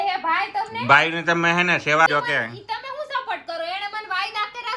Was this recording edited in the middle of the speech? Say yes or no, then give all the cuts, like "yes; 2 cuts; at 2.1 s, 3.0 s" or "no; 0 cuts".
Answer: yes; 1 cut; at 2.1 s